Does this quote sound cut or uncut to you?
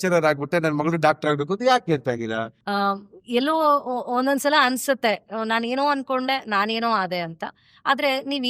cut